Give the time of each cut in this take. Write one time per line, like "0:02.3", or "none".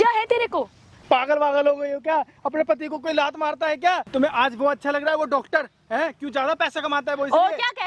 0:00.9
0:04.0

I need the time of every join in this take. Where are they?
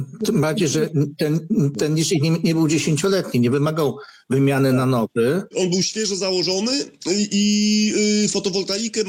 0:05.5

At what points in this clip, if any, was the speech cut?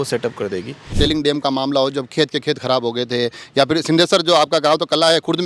0:00.9

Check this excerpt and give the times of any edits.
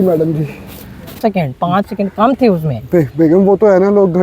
0:01.2

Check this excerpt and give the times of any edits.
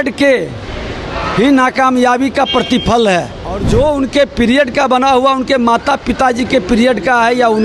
0:03.6

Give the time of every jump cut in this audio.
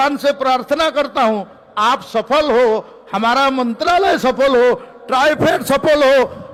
none

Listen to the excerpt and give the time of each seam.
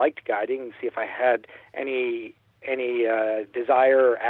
none

